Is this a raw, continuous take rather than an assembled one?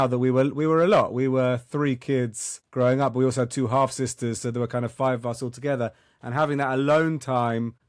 yes; 0 cuts

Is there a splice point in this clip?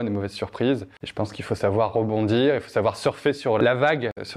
yes; 2 cuts; at 1.0 s, 3.6 s

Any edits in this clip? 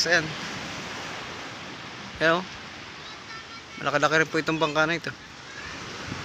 no; 0 cuts

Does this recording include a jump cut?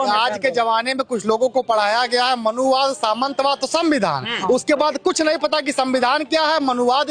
no; 0 cuts

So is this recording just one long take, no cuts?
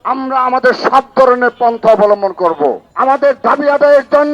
no; 1 cut; at 2.9 s

